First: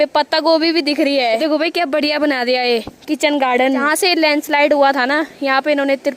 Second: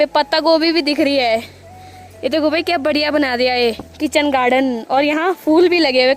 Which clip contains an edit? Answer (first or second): first